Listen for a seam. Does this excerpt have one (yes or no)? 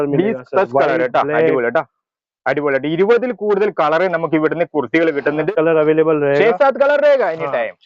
yes